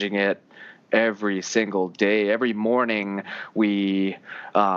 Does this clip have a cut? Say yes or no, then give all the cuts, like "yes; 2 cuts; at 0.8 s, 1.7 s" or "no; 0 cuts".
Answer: no; 0 cuts